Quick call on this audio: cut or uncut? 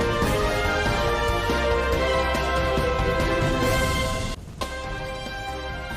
uncut